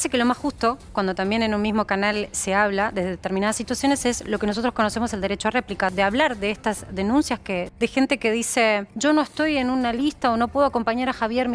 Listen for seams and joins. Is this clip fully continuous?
no; 3 cuts; at 5.9 s, 7.7 s, 8.9 s

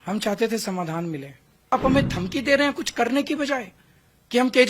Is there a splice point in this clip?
yes; 1 cut; at 1.7 s

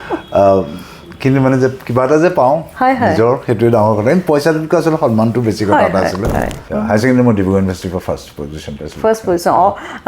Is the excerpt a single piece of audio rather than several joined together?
no; 1 cut; at 6.6 s

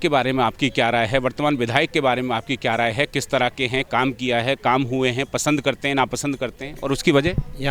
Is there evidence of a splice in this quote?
no; 0 cuts

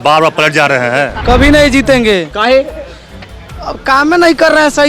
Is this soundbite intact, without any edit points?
no; 1 cut; at 1.2 s

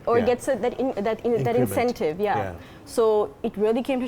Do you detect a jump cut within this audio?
no; 0 cuts

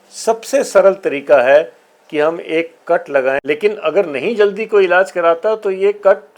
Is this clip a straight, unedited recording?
no; 1 cut; at 3.4 s

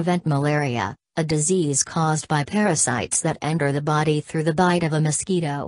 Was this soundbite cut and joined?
no; 0 cuts

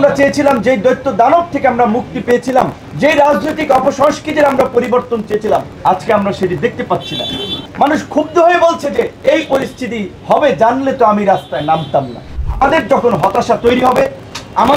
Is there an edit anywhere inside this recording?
yes; 6 cuts; at 2.8 s, 5.7 s, 7.6 s, 9.1 s, 10.1 s, 12.3 s

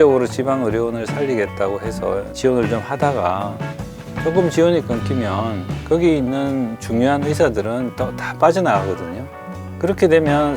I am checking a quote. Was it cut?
yes; 1 cut; at 2.3 s

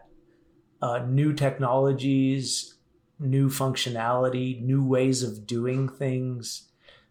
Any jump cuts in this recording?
no; 0 cuts

